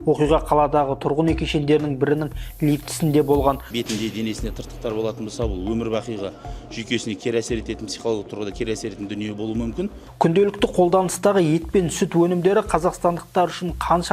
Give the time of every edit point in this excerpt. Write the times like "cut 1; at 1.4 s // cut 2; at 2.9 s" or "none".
cut 1; at 3.7 s // cut 2; at 10.0 s